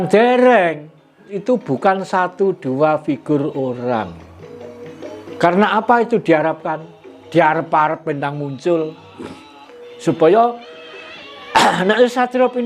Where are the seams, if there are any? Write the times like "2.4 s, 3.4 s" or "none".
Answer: 1.3 s

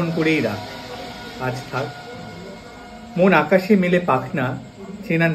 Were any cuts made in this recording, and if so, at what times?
none

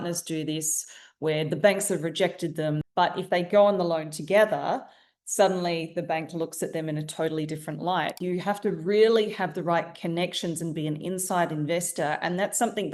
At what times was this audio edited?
2.8 s, 8.2 s

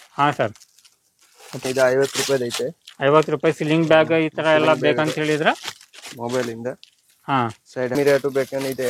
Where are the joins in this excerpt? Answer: 1.6 s, 7.9 s

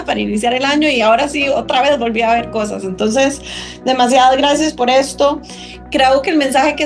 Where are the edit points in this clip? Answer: none

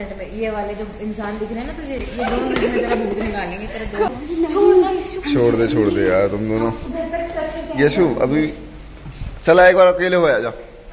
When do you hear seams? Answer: none

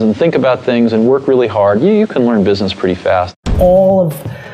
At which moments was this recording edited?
3.4 s

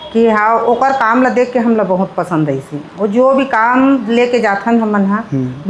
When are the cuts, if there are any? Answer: none

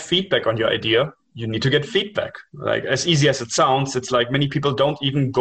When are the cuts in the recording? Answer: none

